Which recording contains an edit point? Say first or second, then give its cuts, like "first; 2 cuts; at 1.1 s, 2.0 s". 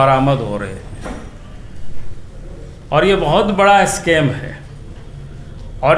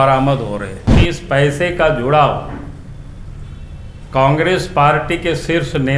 second; 1 cut; at 0.9 s